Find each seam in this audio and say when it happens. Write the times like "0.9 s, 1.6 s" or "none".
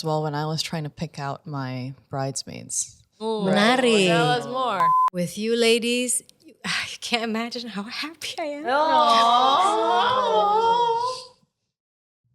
4.9 s